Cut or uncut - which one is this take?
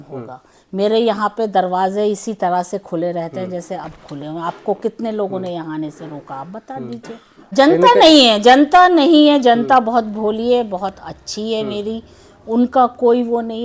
cut